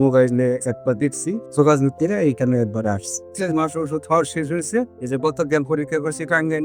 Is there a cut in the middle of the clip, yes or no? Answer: yes